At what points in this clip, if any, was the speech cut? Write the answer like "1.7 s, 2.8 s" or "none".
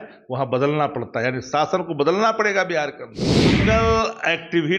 3.5 s